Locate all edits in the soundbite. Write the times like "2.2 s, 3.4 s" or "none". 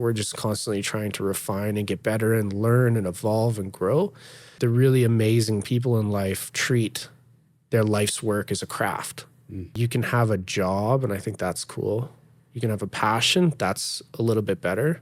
4.5 s, 9.8 s